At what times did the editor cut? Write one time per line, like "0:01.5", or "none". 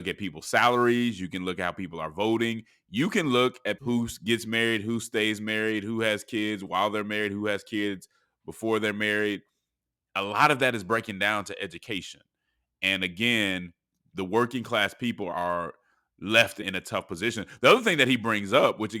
0:03.8
0:15.3
0:16.6